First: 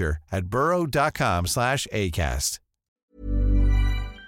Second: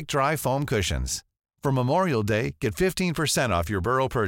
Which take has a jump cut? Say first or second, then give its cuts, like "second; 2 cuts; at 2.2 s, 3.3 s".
first; 1 cut; at 3.0 s